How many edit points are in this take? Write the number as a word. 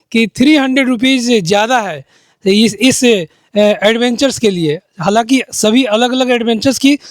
zero